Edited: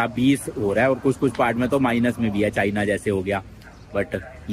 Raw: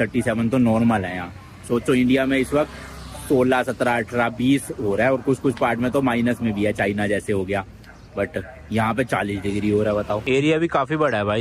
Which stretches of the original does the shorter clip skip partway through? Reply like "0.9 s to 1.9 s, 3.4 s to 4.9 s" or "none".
none